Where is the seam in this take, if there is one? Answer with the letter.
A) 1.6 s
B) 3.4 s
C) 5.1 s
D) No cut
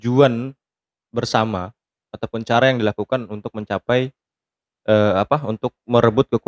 D